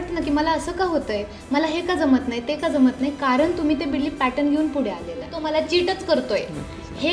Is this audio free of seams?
no; 1 cut; at 5.4 s

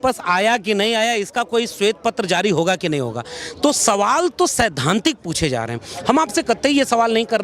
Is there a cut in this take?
no; 0 cuts

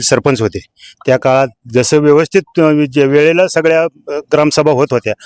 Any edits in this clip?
no; 0 cuts

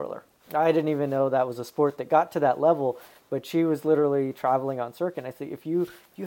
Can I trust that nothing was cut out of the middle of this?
yes; 0 cuts

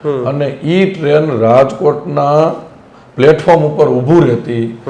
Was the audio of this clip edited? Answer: no; 0 cuts

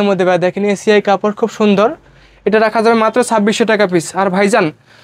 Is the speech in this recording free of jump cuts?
yes; 0 cuts

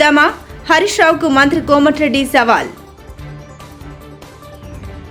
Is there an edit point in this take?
no; 0 cuts

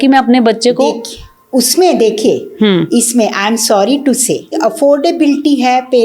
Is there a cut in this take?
yes; 1 cut; at 4.6 s

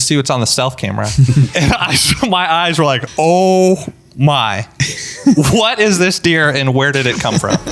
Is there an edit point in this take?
yes; 2 cuts; at 1.5 s, 3.1 s

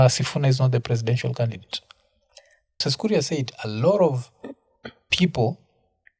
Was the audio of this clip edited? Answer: yes; 1 cut; at 2.8 s

